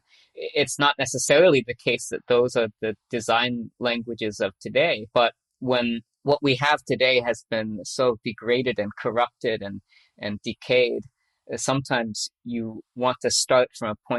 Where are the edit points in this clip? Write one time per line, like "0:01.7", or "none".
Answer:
none